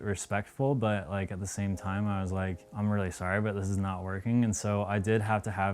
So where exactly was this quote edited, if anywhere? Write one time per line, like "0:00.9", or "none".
0:02.6